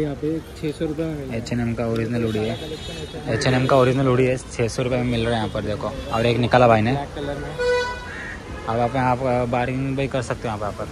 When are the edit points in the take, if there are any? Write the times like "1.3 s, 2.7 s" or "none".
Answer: none